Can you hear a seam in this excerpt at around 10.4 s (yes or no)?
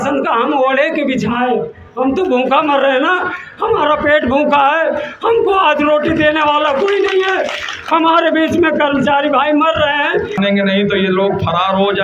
yes